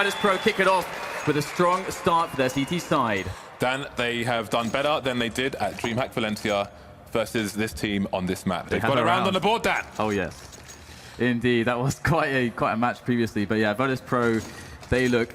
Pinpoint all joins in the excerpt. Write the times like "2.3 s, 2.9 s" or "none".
13.3 s